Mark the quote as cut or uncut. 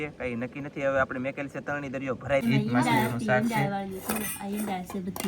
cut